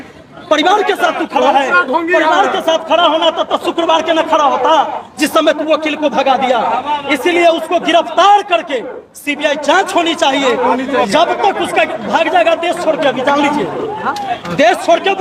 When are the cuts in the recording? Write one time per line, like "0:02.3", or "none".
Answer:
none